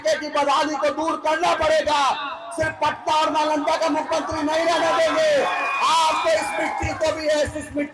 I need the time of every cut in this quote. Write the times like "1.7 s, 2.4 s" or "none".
none